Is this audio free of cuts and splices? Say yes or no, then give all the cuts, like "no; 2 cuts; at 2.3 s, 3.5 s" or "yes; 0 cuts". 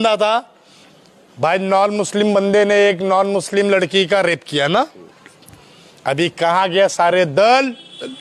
yes; 0 cuts